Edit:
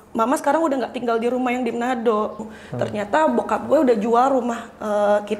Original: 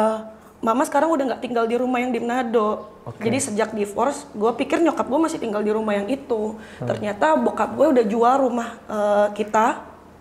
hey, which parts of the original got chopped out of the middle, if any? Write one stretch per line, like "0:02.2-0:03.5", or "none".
0:03.0-0:06.6